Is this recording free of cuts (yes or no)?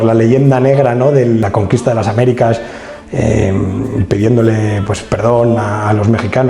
no